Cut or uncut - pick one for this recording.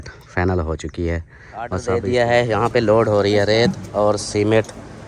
cut